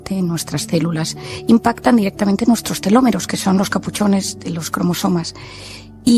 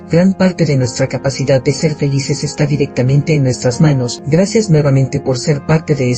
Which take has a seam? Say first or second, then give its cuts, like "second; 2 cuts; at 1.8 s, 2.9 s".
second; 1 cut; at 4.2 s